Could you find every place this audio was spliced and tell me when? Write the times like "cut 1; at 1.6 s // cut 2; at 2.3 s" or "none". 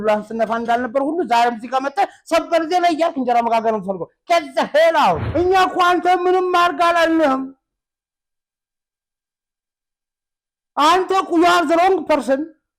cut 1; at 5.2 s